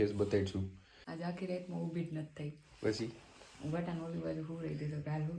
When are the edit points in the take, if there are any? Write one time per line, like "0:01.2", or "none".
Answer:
0:01.1